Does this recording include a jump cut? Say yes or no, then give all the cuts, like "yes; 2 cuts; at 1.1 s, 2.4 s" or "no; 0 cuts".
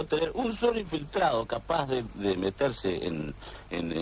no; 0 cuts